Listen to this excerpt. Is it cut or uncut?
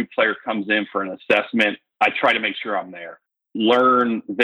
cut